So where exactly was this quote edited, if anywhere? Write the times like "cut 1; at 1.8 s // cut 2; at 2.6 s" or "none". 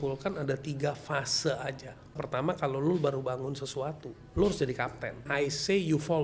cut 1; at 2.2 s // cut 2; at 5.2 s